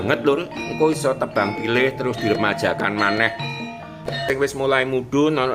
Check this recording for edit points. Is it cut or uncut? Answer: cut